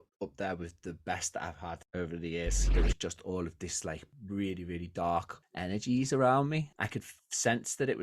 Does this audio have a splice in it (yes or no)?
yes